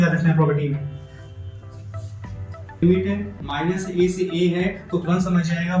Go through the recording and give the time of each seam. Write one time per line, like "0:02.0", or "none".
0:02.8